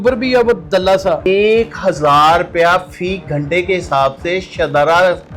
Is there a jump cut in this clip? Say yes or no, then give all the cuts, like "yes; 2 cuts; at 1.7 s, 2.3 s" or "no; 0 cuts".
yes; 1 cut; at 1.2 s